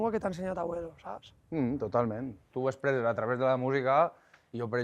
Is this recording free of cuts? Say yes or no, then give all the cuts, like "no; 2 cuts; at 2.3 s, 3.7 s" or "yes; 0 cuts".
no; 1 cut; at 2.5 s